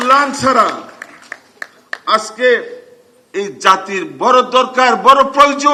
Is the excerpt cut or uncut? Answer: uncut